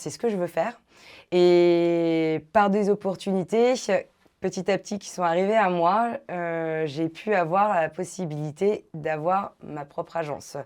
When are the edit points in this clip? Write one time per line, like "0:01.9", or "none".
none